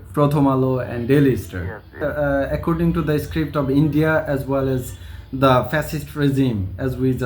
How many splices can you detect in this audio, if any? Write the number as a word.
one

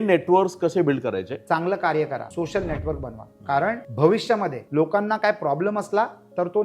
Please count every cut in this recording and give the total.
four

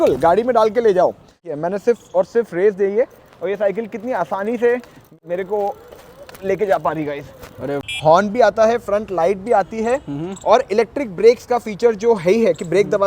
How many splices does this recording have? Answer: three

